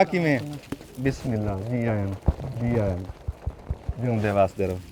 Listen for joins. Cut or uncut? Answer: uncut